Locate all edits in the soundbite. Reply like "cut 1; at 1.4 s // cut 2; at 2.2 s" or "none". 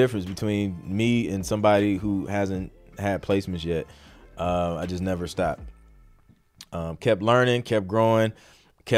none